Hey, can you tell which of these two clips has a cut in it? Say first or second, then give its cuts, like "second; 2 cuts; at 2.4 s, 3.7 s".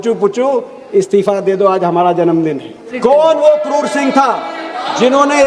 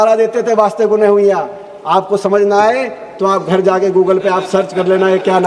first; 1 cut; at 2.9 s